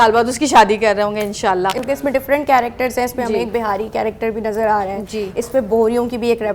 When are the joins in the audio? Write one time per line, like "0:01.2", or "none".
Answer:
0:01.8

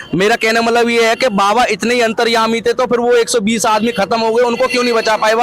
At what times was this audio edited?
none

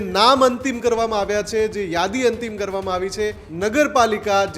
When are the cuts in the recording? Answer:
0:03.4

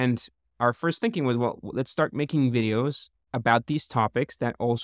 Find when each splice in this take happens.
none

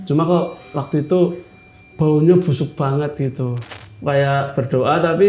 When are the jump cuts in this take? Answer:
0:03.6

